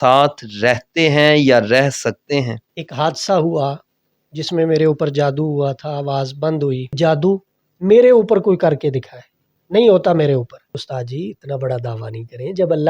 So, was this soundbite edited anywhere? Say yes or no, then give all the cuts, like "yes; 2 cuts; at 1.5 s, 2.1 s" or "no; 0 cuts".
yes; 3 cuts; at 2.6 s, 6.9 s, 10.8 s